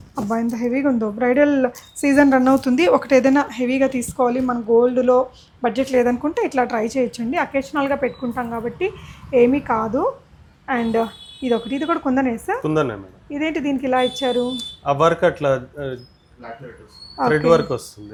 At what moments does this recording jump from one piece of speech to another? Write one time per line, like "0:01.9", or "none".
none